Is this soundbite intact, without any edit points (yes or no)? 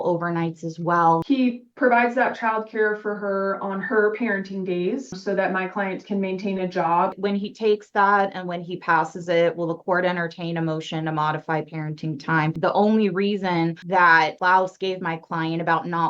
no